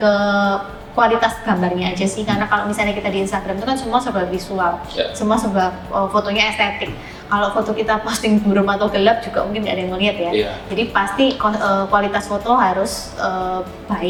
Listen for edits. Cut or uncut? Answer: uncut